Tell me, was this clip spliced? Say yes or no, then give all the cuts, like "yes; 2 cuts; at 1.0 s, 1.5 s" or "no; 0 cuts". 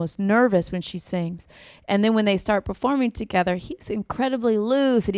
no; 0 cuts